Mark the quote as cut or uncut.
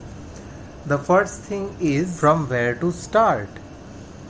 cut